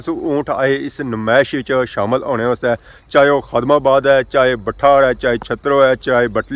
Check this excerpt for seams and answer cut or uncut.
uncut